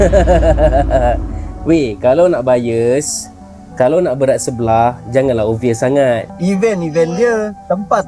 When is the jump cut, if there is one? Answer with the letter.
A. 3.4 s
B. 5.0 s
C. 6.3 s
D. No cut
C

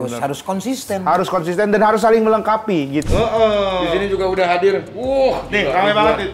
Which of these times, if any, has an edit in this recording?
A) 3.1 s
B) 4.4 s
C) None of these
A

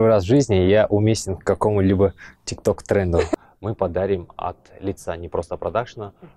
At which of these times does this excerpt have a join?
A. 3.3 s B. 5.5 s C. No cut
A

